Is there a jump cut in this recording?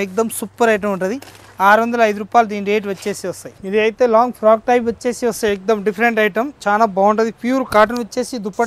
no; 0 cuts

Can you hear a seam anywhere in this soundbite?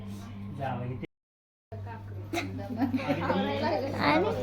yes; 1 cut; at 1.4 s

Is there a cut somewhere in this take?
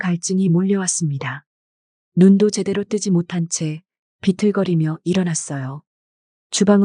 no; 0 cuts

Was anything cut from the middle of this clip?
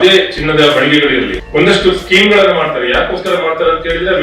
yes; 1 cut; at 1.4 s

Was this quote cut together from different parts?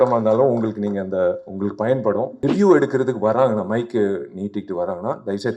yes; 1 cut; at 2.3 s

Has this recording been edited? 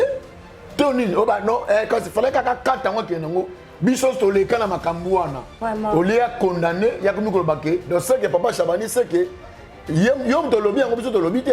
yes; 1 cut; at 5.5 s

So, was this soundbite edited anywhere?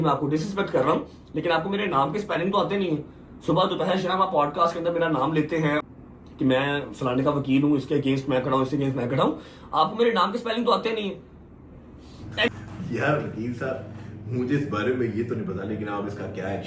no; 0 cuts

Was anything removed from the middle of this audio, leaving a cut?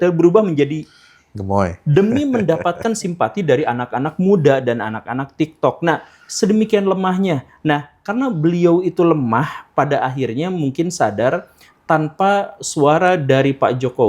no; 0 cuts

